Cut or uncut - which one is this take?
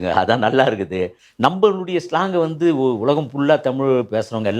cut